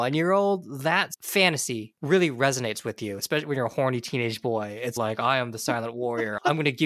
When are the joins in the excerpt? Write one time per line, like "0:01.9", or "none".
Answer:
0:01.9